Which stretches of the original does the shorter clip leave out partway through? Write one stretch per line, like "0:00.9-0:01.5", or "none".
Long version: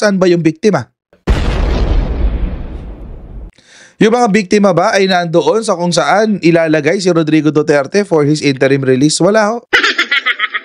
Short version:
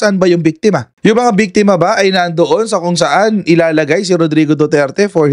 0:00.9-0:03.9